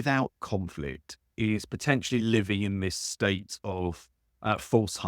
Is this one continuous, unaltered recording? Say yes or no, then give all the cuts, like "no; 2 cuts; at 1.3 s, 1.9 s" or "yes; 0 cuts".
yes; 0 cuts